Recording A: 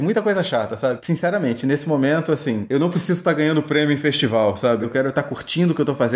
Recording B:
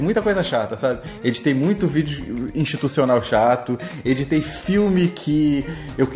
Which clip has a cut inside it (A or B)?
A